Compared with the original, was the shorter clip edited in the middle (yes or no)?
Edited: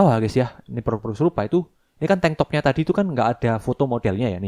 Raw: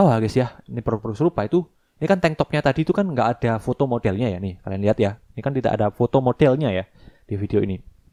no